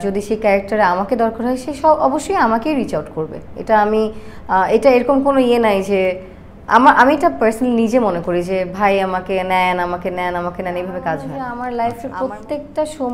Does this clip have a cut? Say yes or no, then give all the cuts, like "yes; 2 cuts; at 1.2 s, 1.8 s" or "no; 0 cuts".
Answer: yes; 1 cut; at 11.4 s